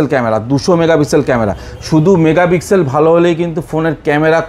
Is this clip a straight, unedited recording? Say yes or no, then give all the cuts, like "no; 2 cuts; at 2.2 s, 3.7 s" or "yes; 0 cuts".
yes; 0 cuts